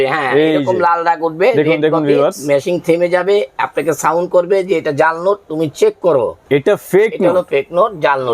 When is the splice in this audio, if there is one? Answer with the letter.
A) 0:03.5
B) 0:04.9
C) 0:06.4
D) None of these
C